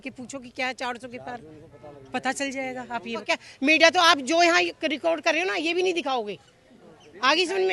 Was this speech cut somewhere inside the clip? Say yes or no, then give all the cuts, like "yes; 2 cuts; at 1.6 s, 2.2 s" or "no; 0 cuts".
yes; 1 cut; at 3.2 s